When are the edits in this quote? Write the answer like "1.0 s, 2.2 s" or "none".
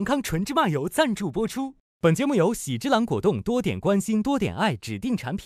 none